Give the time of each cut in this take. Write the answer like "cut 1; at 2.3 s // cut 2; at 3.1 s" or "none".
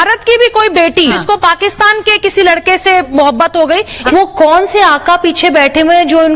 cut 1; at 1.2 s // cut 2; at 3.1 s // cut 3; at 4.0 s